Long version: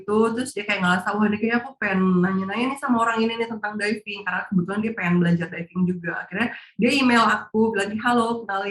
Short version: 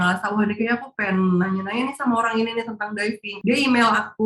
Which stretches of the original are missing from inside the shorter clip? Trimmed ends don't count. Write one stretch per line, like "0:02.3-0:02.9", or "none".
0:04.1-0:06.6

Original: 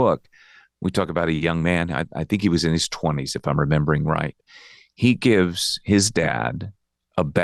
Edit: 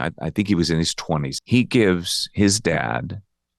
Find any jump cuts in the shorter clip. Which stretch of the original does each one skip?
0:03.3-0:04.8

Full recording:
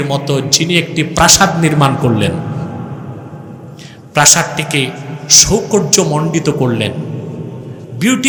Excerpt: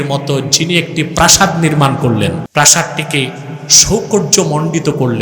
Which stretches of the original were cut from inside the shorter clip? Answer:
0:02.5-0:04.1

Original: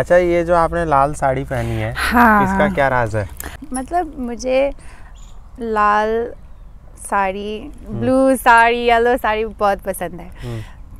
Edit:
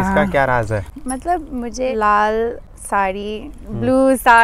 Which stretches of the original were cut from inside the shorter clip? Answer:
0:03.4-0:03.6
0:04.5-0:05.6
0:06.4-0:06.9

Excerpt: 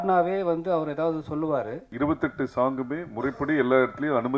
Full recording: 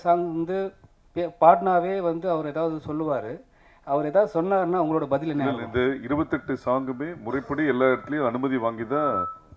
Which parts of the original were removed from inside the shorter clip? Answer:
0:03.5-0:06.0

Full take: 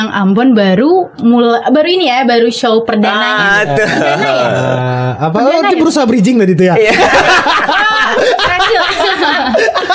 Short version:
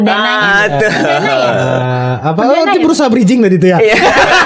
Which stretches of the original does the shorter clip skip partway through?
none

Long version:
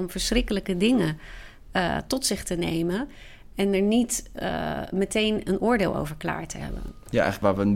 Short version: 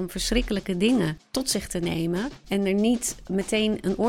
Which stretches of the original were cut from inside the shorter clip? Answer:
0:01.3-0:02.0
0:03.1-0:03.5
0:04.2-0:04.8

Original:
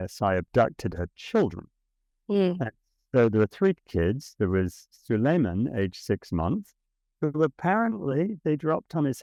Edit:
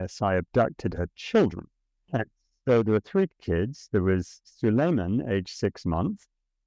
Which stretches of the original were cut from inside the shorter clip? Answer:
0:02.1-0:02.6

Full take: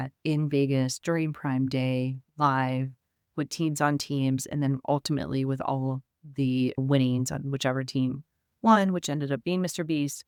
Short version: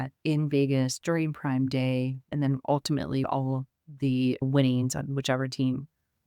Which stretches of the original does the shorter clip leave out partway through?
0:02.3-0:04.5
0:05.5-0:05.6

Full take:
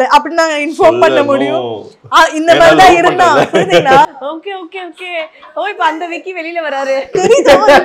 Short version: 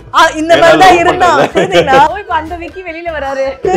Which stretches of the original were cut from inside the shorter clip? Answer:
0:04.1-0:05.6

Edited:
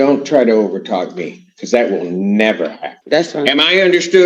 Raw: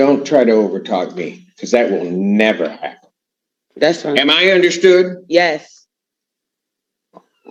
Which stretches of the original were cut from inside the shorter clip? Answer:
0:02.9-0:03.6

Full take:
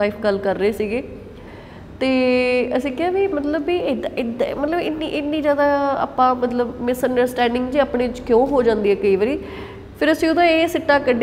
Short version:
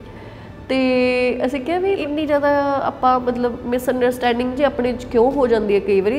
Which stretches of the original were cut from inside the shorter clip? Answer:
0:03.3-0:05.2

